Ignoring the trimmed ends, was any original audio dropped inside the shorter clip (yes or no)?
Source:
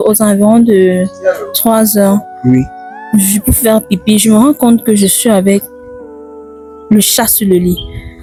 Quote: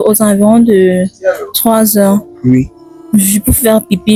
no